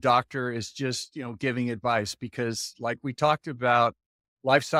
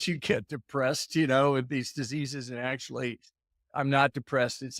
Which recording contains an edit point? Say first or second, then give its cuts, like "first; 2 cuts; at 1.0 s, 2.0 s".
second; 1 cut; at 3.5 s